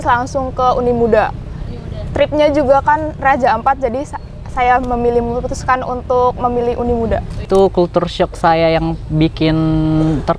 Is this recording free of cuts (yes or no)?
no